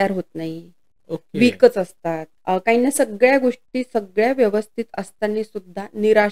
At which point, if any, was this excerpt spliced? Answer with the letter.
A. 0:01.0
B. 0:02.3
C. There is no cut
B